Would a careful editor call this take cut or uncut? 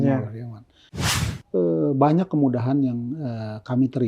cut